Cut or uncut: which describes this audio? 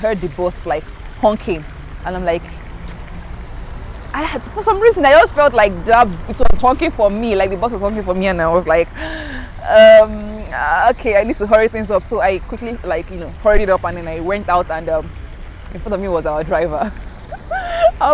uncut